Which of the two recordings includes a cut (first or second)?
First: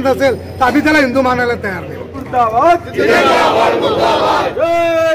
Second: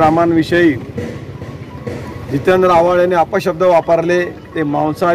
first